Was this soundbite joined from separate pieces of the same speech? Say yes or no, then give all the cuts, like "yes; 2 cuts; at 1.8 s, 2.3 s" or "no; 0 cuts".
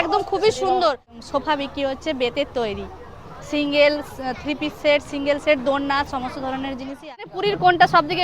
yes; 2 cuts; at 1.1 s, 7.1 s